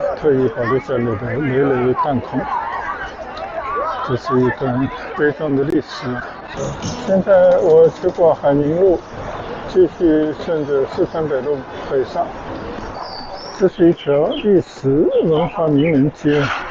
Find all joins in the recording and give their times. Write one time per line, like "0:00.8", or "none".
0:06.5
0:12.9